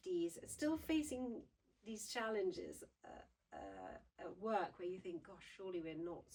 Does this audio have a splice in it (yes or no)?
no